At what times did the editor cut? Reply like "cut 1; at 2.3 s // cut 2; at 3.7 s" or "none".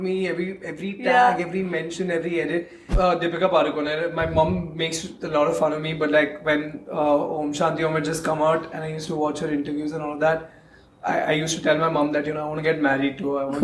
cut 1; at 2.8 s